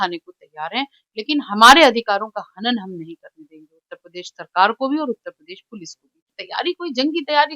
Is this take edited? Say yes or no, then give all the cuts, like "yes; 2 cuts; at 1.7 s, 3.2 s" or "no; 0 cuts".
yes; 1 cut; at 6.4 s